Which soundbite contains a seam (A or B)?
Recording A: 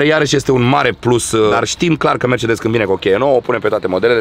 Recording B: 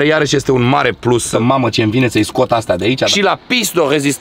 B